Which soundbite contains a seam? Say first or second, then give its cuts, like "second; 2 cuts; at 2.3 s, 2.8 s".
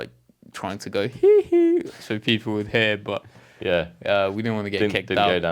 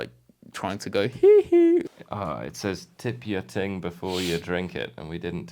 second; 1 cut; at 1.9 s